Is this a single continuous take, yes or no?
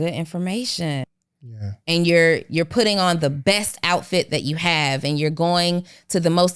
no